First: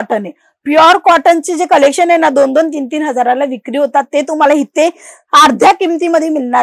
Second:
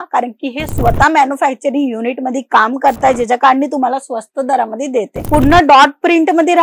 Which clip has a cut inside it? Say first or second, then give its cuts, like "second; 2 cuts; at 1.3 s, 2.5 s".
second; 1 cut; at 5.2 s